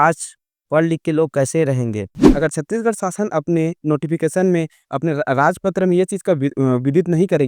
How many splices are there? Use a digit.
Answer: 1